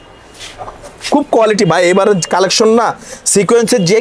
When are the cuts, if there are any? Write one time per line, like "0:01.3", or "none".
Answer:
none

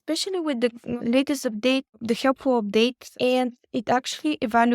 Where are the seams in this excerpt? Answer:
0:02.0
0:03.1

